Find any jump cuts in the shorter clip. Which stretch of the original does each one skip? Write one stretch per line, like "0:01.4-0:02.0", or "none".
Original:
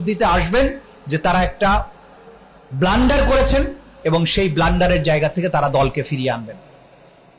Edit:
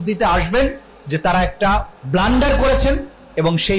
0:02.0-0:02.6